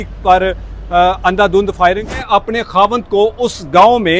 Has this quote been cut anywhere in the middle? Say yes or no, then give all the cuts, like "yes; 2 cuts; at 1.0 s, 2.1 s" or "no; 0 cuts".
yes; 1 cut; at 2.2 s